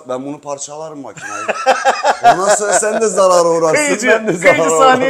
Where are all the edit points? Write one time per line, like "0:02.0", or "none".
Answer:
none